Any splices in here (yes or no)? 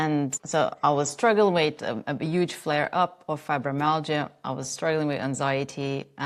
no